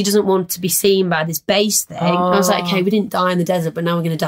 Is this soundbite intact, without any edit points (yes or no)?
yes